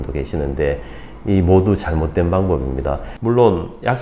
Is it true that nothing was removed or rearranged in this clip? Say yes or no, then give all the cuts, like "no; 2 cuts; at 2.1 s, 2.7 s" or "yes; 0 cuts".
no; 1 cut; at 3.1 s